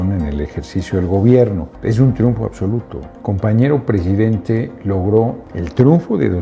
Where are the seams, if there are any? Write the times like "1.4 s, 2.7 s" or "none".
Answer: 1.7 s, 5.5 s